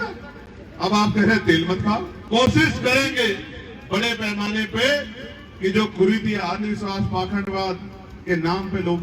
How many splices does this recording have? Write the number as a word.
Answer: one